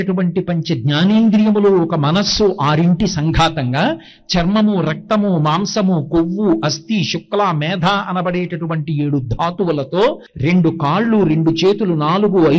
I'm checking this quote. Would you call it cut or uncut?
cut